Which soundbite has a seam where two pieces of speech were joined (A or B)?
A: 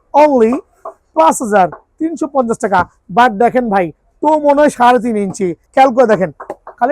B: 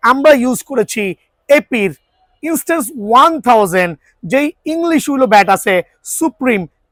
A